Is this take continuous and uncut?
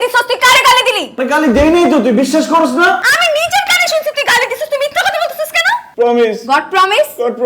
no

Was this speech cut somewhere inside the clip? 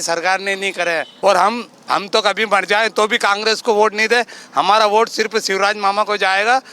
yes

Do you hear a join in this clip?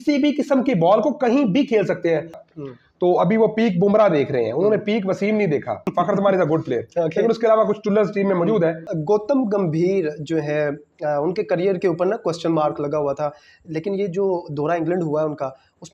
yes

